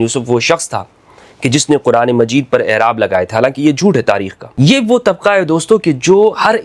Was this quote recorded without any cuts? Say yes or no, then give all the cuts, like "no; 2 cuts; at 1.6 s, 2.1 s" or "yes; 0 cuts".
no; 1 cut; at 4.4 s